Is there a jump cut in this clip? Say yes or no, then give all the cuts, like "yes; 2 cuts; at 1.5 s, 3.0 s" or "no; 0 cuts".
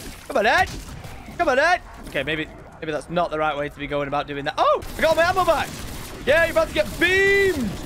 yes; 2 cuts; at 2.0 s, 4.9 s